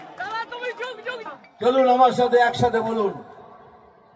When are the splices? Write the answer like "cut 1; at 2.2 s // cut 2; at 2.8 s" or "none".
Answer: cut 1; at 1.2 s